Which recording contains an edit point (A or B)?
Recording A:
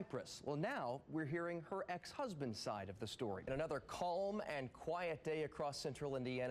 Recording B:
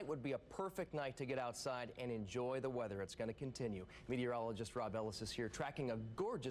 A